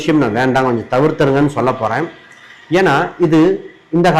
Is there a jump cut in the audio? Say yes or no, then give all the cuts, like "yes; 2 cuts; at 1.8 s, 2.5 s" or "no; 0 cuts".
no; 0 cuts